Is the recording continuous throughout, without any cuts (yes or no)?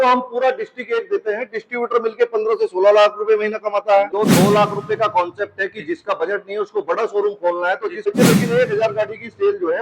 no